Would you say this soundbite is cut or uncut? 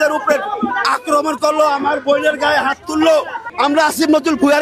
cut